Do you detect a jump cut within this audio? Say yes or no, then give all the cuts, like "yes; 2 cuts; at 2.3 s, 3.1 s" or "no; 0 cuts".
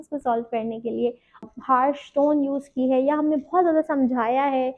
yes; 1 cut; at 1.4 s